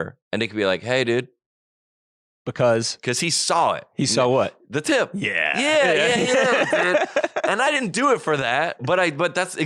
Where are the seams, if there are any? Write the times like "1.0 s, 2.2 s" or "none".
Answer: none